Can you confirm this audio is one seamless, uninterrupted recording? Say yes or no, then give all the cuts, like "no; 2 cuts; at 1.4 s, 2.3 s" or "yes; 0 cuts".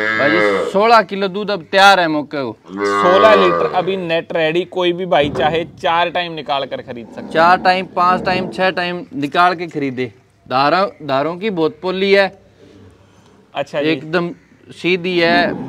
yes; 0 cuts